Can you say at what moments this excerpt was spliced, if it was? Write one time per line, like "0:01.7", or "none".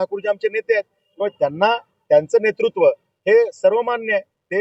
none